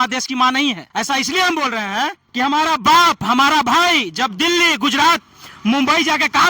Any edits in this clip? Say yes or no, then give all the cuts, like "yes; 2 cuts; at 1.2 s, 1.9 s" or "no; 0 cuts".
yes; 2 cuts; at 0.8 s, 2.2 s